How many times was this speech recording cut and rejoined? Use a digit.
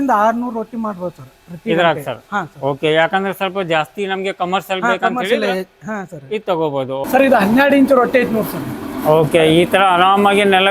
1